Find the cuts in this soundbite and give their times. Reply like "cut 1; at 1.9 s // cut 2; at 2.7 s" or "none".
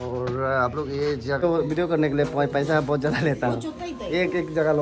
cut 1; at 1.4 s